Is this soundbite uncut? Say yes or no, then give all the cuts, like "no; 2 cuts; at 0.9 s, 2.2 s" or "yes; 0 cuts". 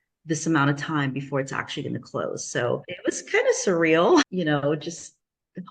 no; 2 cuts; at 2.9 s, 4.3 s